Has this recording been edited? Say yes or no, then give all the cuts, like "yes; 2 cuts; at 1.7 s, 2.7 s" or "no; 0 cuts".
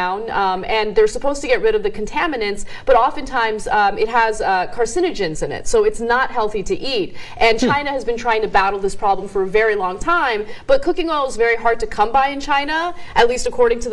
yes; 1 cut; at 6.2 s